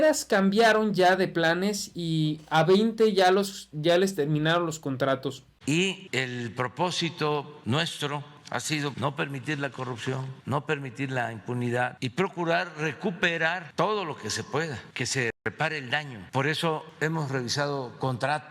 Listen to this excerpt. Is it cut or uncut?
cut